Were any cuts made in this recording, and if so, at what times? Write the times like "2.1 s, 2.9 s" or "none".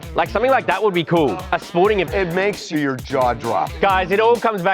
2.2 s, 3.7 s